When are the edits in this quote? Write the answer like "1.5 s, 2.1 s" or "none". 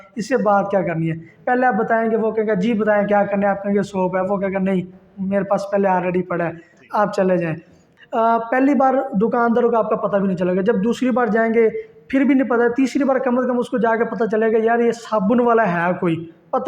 7.9 s